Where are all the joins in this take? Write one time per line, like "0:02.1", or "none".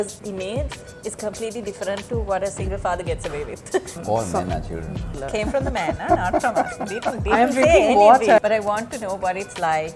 0:04.0
0:05.2
0:08.4